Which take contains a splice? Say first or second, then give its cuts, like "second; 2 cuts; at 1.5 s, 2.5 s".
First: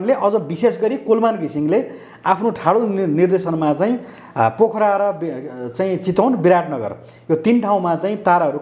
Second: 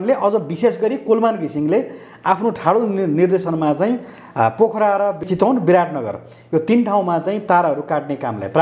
second; 1 cut; at 5.2 s